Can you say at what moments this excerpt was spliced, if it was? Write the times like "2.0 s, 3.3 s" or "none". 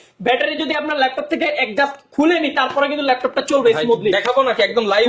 none